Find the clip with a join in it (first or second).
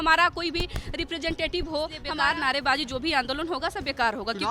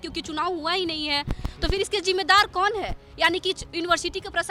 first